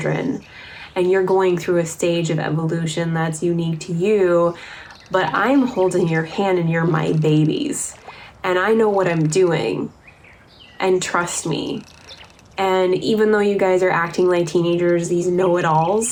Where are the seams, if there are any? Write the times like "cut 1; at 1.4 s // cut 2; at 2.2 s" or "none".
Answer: none